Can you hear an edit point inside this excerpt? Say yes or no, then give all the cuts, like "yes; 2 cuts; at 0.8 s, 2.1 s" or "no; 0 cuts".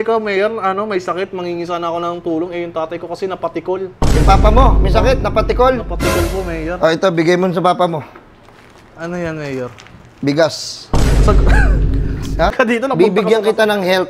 yes; 1 cut; at 12.5 s